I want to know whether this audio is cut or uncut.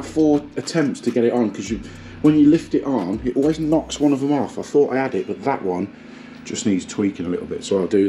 uncut